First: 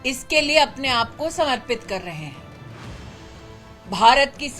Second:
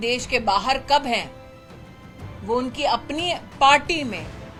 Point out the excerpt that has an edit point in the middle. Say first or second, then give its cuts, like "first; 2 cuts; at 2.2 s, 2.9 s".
first; 2 cuts; at 2.3 s, 3.8 s